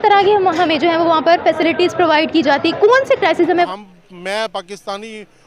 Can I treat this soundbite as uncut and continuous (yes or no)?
no